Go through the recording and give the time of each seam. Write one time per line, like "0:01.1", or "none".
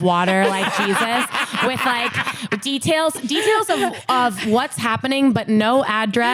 none